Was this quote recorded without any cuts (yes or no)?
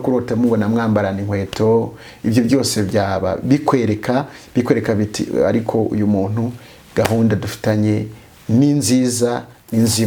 yes